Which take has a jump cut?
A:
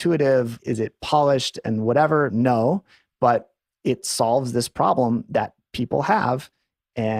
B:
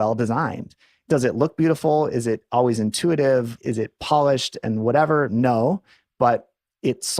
B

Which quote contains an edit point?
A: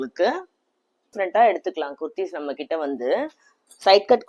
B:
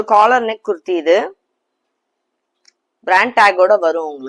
A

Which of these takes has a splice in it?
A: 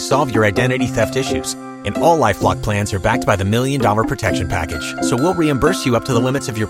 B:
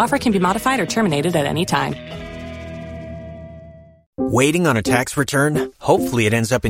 B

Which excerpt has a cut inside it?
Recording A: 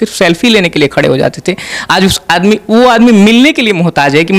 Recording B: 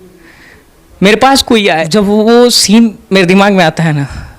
B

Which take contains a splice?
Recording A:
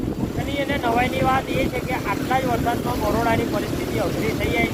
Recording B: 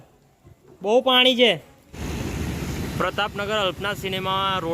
B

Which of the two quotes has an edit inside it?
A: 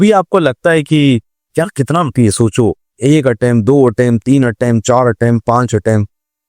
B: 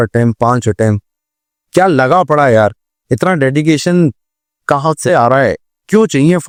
A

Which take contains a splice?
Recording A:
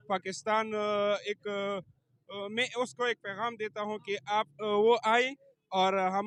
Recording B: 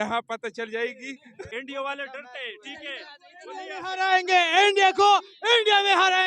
B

